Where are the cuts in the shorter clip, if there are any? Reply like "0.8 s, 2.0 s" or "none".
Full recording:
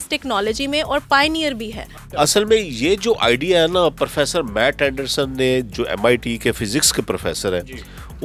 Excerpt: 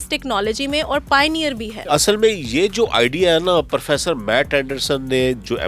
1.7 s